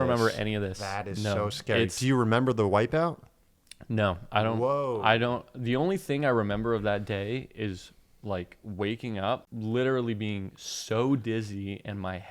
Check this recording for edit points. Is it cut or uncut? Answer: cut